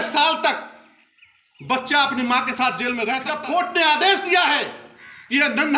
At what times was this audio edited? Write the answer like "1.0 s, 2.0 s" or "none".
3.3 s